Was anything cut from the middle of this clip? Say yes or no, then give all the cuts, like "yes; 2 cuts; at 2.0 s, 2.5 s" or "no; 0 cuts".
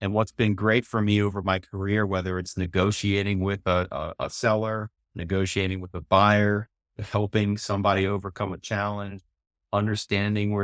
no; 0 cuts